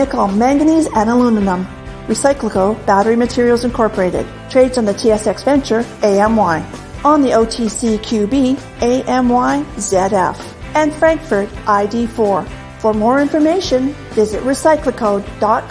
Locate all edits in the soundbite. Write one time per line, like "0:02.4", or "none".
none